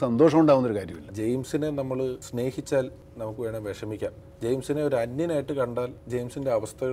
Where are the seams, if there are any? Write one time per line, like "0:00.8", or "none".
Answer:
0:01.1
0:02.2
0:03.0
0:04.2

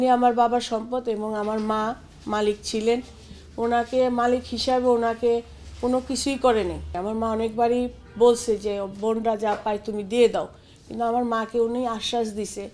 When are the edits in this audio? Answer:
0:07.0

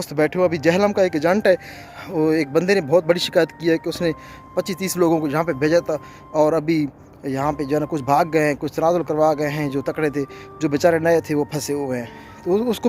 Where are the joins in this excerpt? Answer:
0:01.8

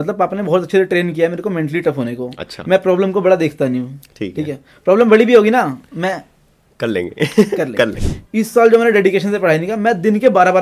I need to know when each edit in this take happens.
0:08.0

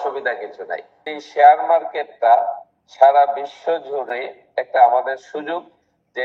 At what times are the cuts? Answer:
0:00.9
0:04.1

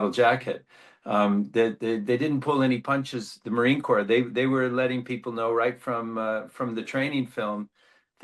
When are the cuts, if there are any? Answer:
none

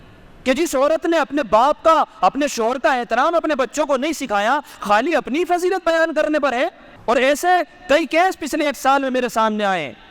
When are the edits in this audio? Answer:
0:06.9

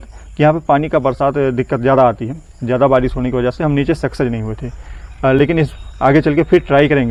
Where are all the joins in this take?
none

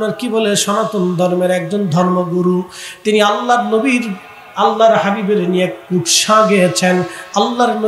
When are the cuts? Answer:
none

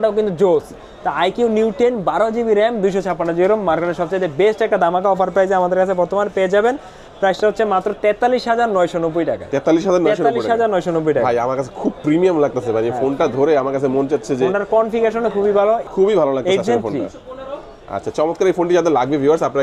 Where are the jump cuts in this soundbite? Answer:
none

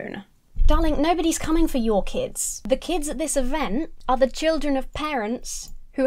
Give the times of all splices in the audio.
0:04.0

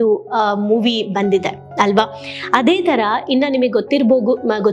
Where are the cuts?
none

